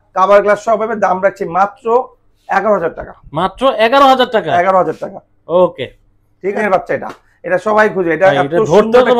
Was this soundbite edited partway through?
yes; 1 cut; at 6.6 s

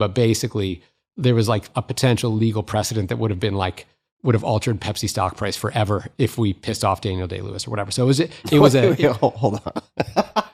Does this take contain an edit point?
no; 0 cuts

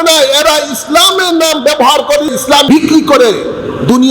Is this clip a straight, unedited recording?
no; 1 cut; at 2.4 s

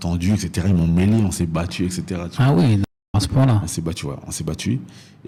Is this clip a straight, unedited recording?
yes; 0 cuts

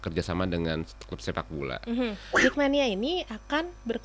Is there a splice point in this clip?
yes; 1 cut; at 2.2 s

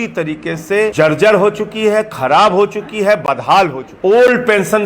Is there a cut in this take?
yes; 2 cuts; at 0.9 s, 3.9 s

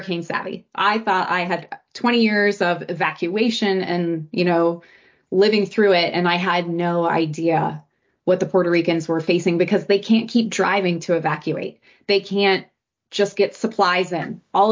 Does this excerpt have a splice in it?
no; 0 cuts

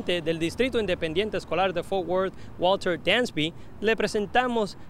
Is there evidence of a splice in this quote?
no; 0 cuts

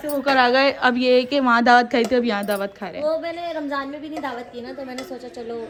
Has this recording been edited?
no; 0 cuts

